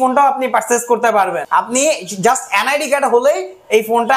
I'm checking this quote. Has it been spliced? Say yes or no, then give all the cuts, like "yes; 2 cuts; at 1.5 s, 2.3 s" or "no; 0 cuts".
yes; 1 cut; at 1.4 s